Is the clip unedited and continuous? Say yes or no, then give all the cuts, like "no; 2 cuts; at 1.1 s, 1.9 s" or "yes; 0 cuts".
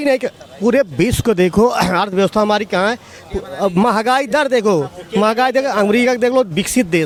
yes; 0 cuts